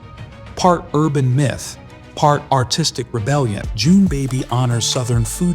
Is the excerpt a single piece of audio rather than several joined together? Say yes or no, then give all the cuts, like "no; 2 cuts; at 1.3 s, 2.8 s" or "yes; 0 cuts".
no; 1 cut; at 3.7 s